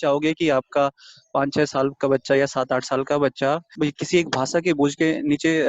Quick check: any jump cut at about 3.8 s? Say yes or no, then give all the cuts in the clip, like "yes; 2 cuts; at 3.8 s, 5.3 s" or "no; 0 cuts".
yes; 1 cut; at 3.8 s